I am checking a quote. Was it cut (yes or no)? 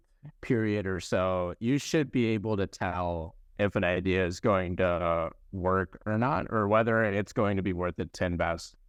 no